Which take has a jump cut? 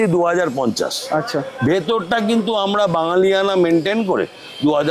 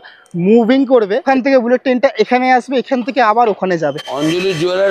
second; 2 cuts; at 1.2 s, 4.1 s

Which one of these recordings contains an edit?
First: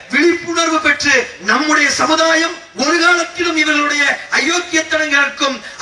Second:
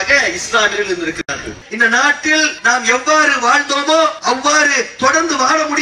second; 3 cuts; at 1.6 s, 2.6 s, 4.2 s

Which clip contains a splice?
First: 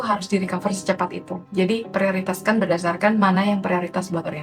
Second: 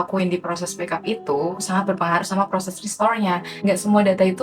second; 1 cut; at 3.5 s

